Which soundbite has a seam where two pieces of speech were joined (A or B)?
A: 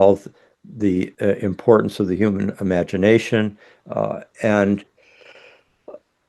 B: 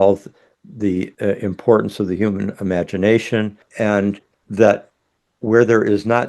B